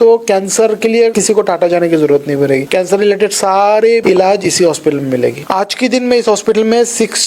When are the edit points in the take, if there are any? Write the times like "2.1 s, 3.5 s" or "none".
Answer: 1.2 s, 2.7 s, 4.0 s, 5.4 s